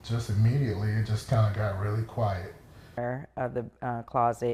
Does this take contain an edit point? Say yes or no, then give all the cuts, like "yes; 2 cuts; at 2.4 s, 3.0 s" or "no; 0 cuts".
yes; 1 cut; at 2.9 s